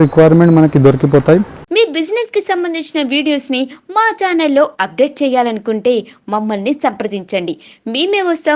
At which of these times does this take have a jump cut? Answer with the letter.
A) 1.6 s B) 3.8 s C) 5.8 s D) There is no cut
A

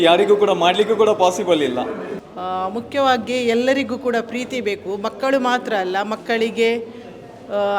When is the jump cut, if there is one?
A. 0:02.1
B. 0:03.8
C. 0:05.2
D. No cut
A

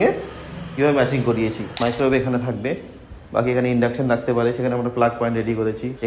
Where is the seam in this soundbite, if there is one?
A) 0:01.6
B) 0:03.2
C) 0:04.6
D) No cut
A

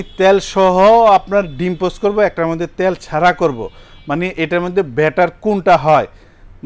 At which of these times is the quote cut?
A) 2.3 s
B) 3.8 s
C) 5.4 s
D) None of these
D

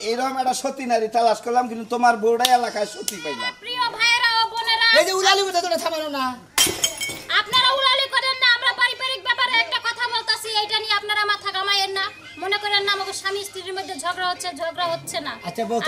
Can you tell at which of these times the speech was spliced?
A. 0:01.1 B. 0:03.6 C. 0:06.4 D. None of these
B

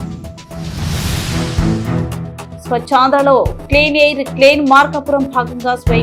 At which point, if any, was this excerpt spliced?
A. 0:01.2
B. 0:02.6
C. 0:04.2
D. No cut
B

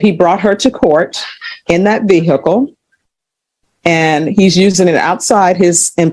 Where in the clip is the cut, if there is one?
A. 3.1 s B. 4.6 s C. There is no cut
C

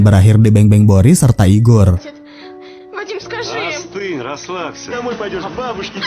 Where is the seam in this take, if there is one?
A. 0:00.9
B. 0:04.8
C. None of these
B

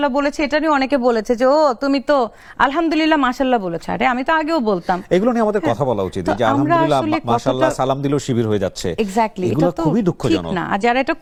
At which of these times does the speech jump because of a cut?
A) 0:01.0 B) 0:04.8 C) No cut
C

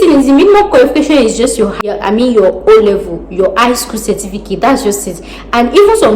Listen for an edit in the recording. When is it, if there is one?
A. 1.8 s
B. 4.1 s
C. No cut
A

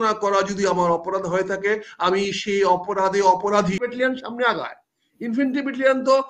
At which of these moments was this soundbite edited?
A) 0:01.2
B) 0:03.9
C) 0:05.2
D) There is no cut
B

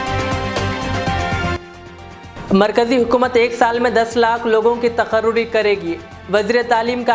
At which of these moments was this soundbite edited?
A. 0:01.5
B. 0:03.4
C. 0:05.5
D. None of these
A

